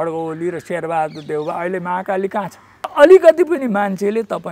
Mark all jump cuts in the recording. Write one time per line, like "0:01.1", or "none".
0:02.9